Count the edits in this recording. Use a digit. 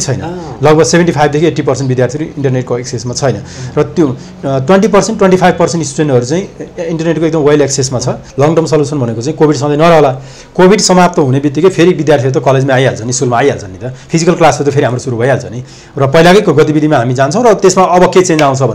1